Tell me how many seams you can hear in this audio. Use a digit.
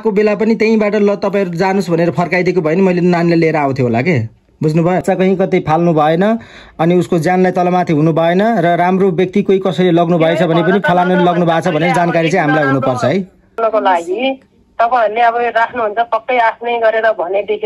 2